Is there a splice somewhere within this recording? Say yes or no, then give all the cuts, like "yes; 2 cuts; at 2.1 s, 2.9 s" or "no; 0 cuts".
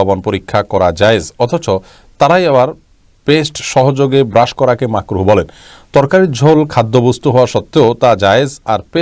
no; 0 cuts